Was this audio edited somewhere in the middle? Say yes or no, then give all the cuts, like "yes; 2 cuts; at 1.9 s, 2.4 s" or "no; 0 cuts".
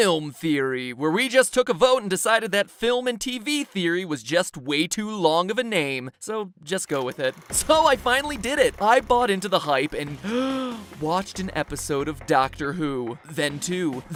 no; 0 cuts